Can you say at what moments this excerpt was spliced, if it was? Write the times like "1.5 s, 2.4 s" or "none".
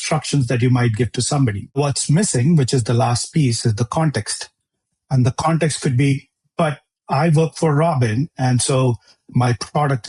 1.8 s